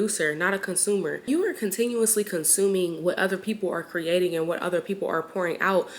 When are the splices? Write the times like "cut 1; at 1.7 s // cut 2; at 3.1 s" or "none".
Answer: cut 1; at 1.3 s

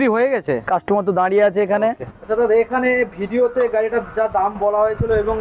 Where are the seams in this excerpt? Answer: cut 1; at 2.1 s

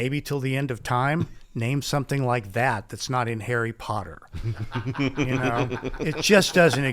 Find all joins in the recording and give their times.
cut 1; at 1.4 s

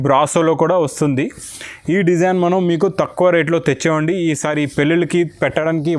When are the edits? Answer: none

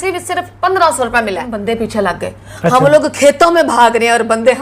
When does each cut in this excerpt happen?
cut 1; at 1.5 s

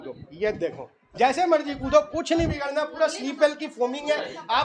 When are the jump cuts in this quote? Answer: none

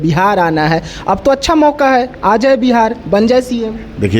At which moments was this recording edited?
none

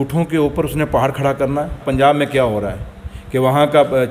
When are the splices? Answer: cut 1; at 1.9 s

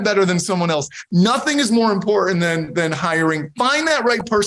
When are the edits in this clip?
cut 1; at 1.0 s

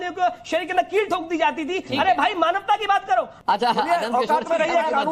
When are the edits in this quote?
cut 1; at 3.3 s

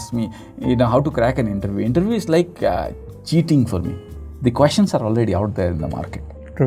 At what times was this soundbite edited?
none

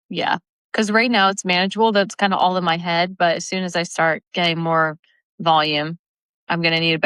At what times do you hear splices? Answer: none

